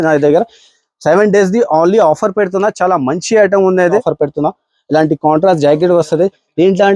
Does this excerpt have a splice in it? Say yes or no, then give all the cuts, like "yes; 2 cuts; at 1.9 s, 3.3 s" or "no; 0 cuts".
yes; 1 cut; at 3.9 s